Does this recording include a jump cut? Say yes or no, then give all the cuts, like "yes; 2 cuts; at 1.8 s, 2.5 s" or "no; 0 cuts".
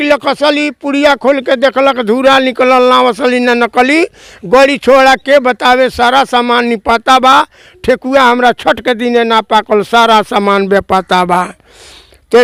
no; 0 cuts